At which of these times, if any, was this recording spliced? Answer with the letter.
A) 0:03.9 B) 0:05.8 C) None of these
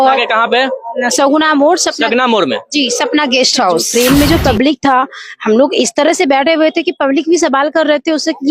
A